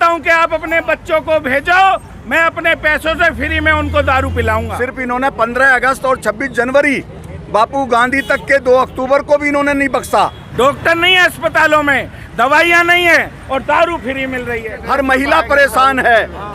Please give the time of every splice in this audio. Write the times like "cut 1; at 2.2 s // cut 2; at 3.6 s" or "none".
cut 1; at 4.7 s // cut 2; at 10.4 s // cut 3; at 14.7 s

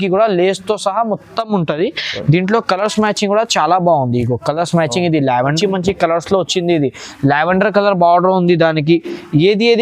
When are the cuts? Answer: cut 1; at 5.5 s

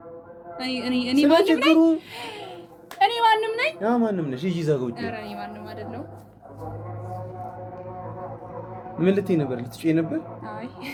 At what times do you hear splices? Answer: none

